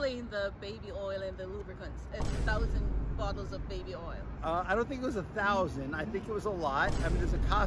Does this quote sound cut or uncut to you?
uncut